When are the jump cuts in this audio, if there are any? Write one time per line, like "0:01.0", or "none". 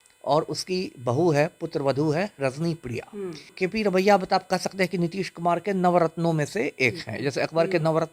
0:03.5